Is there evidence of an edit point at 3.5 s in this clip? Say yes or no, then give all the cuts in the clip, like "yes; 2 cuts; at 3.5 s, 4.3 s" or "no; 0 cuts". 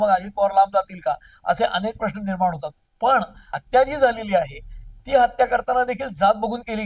yes; 1 cut; at 3.5 s